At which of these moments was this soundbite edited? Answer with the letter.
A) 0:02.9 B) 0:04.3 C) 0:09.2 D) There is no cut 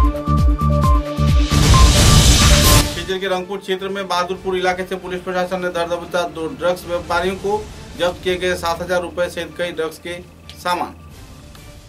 A